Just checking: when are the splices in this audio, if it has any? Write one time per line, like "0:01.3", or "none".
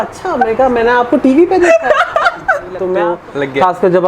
0:02.9